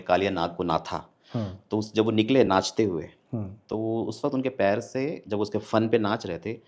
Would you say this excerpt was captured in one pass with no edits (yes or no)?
yes